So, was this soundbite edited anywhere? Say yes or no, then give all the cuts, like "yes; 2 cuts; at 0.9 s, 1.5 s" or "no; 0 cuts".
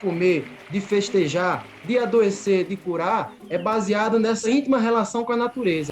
yes; 1 cut; at 4.4 s